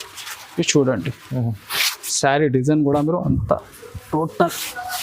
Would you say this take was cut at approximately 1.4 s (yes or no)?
no